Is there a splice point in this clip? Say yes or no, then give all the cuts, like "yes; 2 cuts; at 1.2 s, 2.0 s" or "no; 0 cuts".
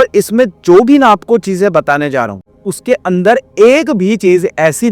yes; 1 cut; at 2.5 s